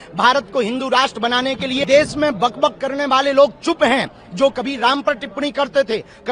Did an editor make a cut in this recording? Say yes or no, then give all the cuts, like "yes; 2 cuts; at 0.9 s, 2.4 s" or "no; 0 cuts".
yes; 1 cut; at 1.8 s